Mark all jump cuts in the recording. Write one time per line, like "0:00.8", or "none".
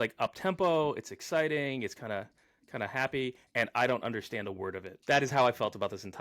0:04.9